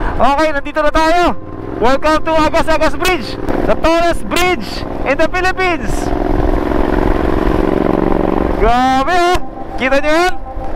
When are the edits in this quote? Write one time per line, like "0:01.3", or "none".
none